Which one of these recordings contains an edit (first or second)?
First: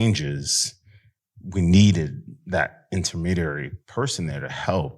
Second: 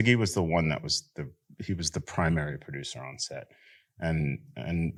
first